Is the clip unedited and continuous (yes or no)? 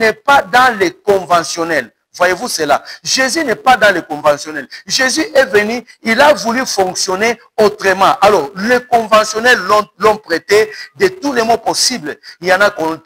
yes